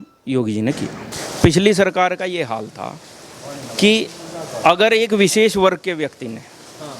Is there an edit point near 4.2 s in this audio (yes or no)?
no